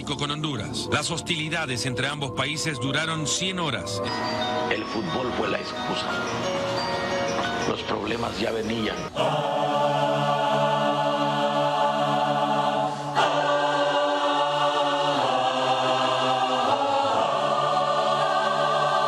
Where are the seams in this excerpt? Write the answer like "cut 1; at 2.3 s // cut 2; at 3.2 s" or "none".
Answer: none